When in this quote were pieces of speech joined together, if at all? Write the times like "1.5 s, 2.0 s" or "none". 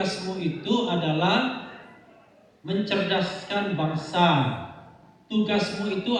none

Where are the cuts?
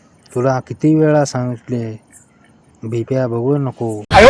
3.4 s

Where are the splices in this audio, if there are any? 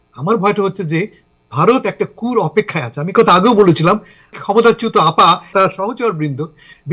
4.4 s, 5.5 s

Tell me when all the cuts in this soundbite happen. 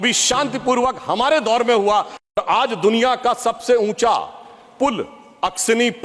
2.2 s

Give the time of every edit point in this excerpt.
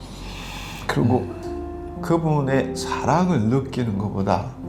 none

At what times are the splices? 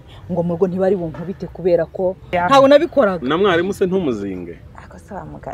2.3 s

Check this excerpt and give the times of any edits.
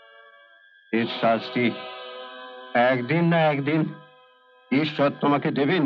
none

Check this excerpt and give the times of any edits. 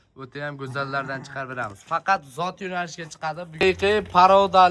3.4 s

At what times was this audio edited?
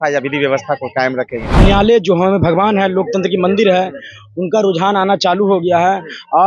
1.6 s

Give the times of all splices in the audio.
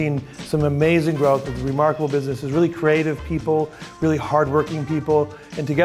none

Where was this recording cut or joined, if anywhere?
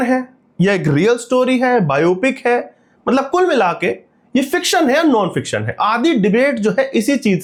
none

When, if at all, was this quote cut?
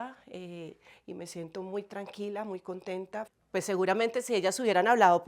3.3 s

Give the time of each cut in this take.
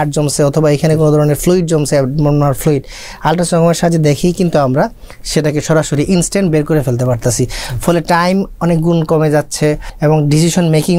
9.9 s

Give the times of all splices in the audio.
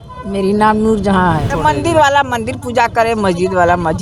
1.5 s

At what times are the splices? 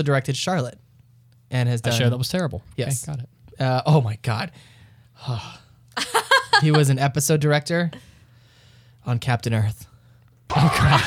none

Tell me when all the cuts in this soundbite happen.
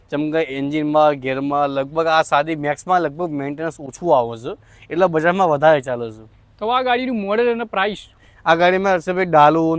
none

